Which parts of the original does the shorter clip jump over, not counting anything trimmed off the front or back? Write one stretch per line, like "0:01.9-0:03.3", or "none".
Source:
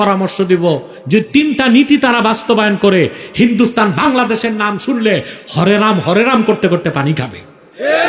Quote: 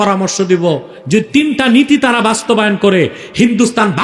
none